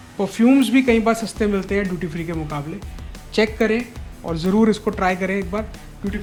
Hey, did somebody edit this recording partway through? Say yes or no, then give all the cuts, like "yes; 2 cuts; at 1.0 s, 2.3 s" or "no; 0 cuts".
no; 0 cuts